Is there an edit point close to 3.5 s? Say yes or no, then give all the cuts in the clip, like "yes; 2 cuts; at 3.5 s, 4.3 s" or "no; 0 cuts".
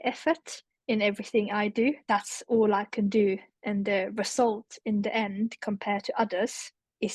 no; 1 cut; at 2.0 s